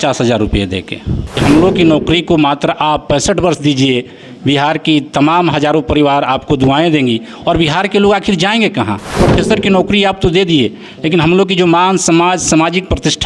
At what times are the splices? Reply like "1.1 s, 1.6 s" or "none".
1.4 s, 9.0 s